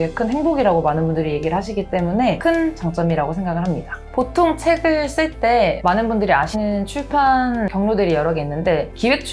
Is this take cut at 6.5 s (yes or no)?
yes